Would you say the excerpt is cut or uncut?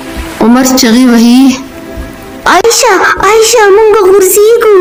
uncut